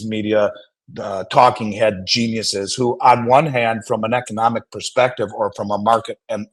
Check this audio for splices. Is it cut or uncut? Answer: uncut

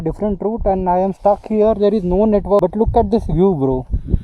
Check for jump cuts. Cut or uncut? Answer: cut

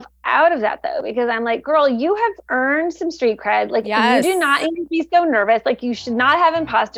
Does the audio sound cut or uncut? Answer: cut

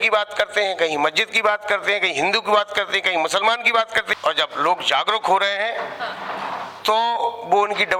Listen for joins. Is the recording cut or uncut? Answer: cut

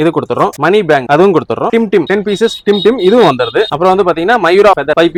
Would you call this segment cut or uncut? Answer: uncut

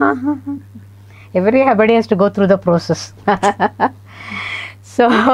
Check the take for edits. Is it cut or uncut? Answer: uncut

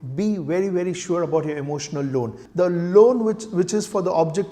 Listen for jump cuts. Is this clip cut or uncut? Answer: cut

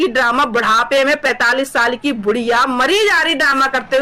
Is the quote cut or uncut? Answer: uncut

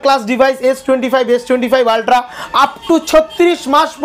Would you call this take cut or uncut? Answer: uncut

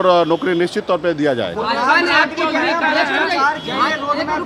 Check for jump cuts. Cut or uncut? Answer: uncut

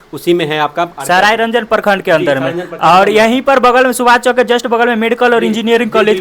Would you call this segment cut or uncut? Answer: uncut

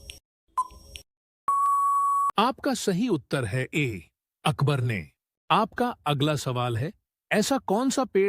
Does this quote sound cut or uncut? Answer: cut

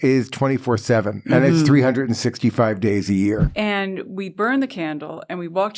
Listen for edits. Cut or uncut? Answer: cut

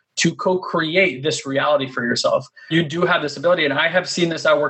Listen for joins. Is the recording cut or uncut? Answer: cut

